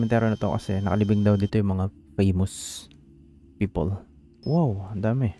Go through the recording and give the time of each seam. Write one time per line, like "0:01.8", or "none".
0:04.4